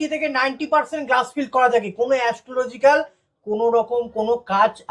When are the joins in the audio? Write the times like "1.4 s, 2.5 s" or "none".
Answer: none